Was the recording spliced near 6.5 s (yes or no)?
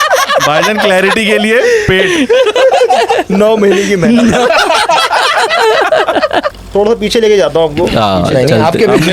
yes